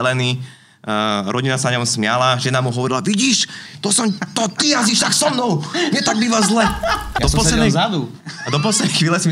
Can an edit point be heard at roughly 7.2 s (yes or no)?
yes